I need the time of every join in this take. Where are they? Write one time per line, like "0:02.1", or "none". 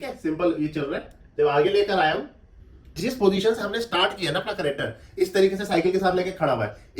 0:03.0